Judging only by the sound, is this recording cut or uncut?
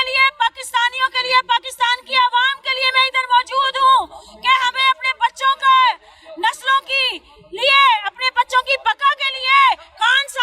uncut